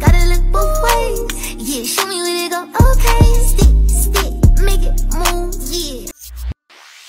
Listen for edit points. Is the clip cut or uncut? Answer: cut